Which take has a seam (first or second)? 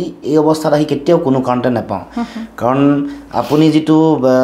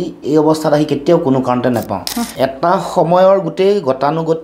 second